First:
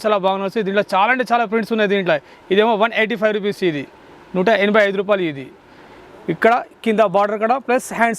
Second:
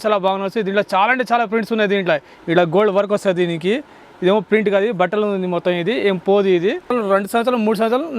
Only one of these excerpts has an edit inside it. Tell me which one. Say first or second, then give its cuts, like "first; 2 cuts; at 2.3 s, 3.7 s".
second; 2 cuts; at 2.3 s, 6.9 s